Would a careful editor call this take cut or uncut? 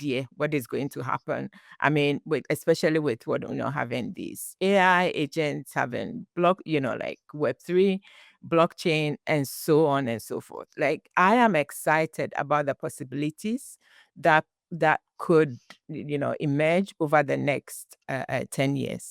cut